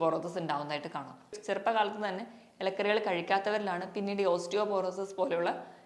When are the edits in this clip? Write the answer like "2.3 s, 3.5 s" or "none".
1.4 s